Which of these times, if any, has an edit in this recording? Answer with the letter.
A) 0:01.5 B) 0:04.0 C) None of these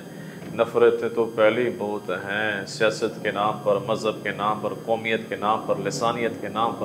C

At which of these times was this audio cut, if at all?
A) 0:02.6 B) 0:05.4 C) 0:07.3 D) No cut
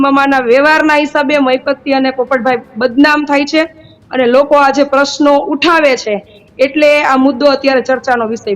D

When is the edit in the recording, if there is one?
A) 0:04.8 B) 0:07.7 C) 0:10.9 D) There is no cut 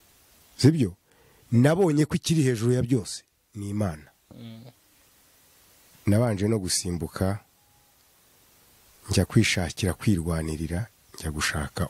A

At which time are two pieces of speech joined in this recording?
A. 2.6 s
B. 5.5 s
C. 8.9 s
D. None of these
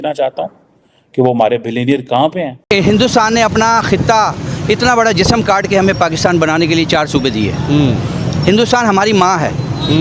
A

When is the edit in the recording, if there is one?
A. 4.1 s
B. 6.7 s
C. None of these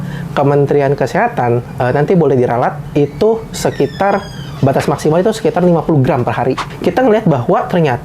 B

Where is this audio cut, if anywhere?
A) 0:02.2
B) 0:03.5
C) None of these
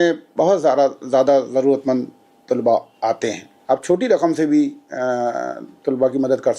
B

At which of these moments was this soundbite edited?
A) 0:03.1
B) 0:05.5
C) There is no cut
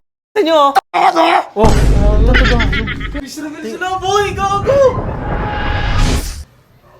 A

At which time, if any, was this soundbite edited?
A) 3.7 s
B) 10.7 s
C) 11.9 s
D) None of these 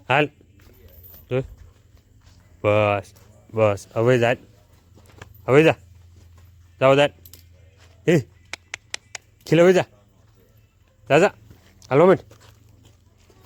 D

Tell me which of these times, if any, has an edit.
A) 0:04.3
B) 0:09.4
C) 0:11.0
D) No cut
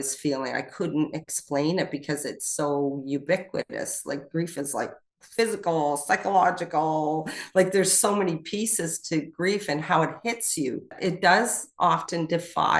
C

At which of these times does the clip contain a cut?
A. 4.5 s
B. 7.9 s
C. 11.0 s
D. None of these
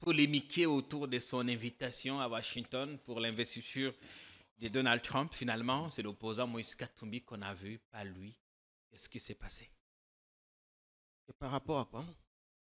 D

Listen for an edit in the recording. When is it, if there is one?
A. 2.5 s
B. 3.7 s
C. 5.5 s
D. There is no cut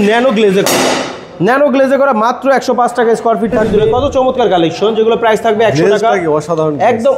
B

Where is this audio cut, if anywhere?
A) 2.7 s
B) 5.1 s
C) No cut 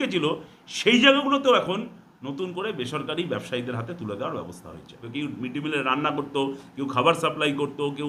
B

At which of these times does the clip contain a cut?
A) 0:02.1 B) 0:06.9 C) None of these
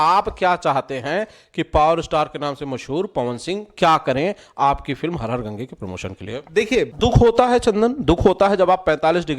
B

